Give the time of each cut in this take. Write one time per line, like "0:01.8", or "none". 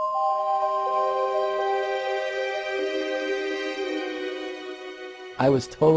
0:01.2